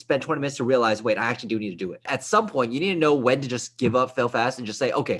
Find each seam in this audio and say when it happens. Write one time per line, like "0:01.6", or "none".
0:02.1